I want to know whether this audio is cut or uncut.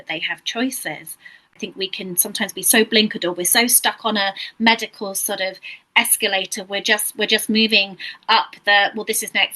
cut